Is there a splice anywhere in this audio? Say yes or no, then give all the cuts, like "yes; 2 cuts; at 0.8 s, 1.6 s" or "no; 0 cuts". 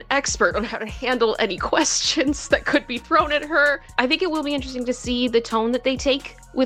no; 0 cuts